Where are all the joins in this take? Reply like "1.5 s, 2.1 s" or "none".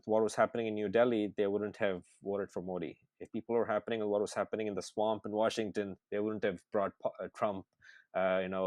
none